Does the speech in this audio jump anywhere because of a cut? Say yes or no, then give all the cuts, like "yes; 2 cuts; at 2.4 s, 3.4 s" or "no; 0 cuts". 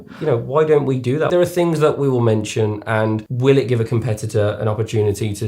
yes; 2 cuts; at 1.3 s, 3.3 s